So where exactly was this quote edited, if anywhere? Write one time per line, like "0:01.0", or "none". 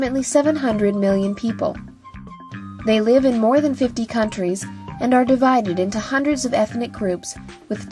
0:02.4